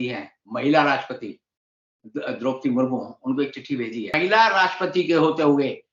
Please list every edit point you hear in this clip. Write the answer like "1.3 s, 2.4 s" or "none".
4.1 s